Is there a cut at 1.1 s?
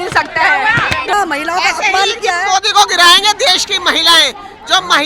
yes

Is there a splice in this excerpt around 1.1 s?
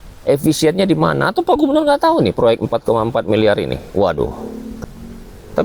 no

